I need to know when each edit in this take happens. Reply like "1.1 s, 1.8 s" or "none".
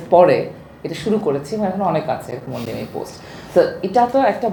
none